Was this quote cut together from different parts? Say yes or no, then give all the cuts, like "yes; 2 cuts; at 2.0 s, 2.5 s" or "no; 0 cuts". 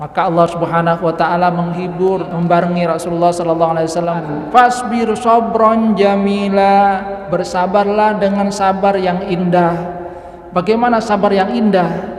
yes; 2 cuts; at 2.3 s, 4.2 s